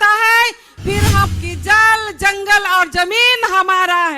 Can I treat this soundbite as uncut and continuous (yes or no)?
no